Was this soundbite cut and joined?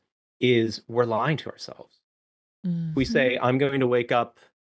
yes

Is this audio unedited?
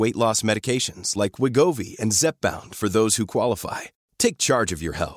yes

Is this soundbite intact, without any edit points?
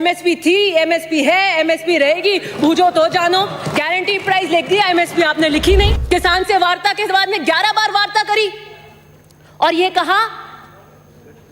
no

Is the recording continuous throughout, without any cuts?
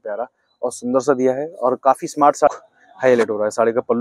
no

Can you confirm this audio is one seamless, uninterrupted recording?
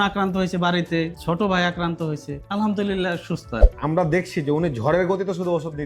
yes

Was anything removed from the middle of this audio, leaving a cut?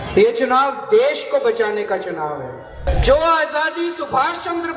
yes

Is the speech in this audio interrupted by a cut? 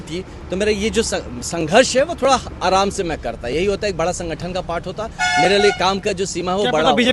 no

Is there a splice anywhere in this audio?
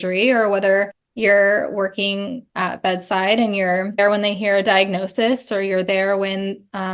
yes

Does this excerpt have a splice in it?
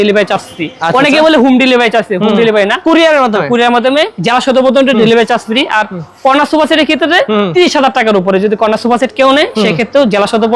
no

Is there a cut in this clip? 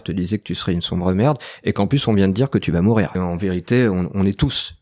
yes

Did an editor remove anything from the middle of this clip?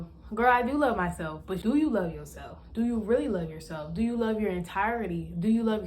yes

